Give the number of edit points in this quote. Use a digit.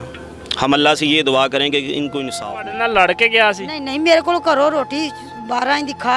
1